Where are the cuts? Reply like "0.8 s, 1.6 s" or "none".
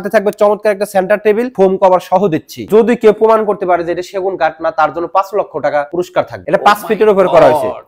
1.5 s, 2.6 s, 6.3 s